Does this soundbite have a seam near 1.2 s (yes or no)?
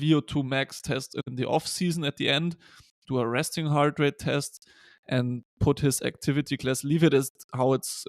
yes